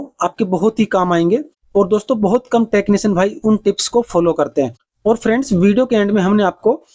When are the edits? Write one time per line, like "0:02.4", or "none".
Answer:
none